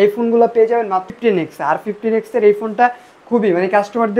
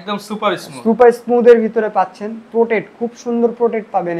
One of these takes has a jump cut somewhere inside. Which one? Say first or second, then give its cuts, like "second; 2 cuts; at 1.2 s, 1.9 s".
first; 1 cut; at 1.1 s